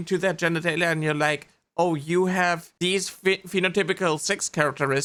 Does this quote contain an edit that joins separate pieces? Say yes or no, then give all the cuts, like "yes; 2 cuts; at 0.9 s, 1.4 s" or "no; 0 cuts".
no; 0 cuts